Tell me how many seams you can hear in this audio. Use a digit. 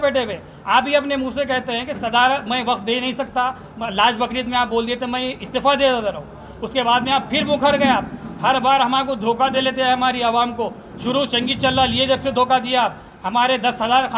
0